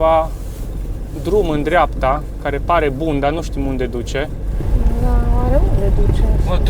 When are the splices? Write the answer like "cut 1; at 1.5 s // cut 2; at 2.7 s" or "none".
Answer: cut 1; at 4.6 s